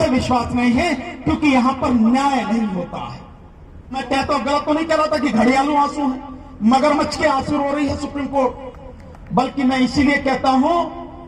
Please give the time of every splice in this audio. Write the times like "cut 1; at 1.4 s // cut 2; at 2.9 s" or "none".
cut 1; at 4.0 s